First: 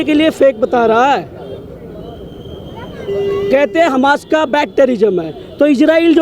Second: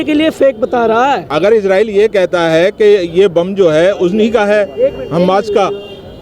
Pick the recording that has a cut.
second; 1 cut; at 1.3 s

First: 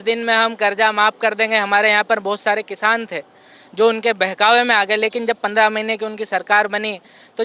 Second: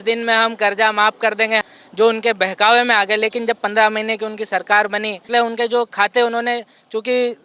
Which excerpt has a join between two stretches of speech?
second; 2 cuts; at 1.6 s, 5.3 s

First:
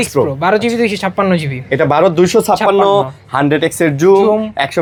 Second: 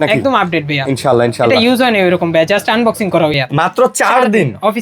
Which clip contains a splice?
second; 1 cut; at 3.4 s

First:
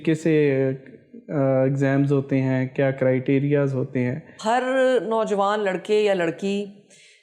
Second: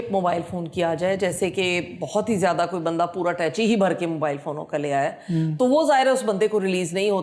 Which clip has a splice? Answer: first; 1 cut; at 4.3 s

